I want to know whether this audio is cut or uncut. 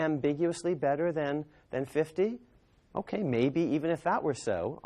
cut